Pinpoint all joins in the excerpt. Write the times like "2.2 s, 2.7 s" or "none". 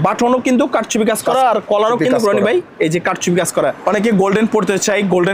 3.8 s